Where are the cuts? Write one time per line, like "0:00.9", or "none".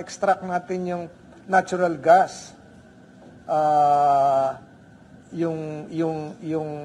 none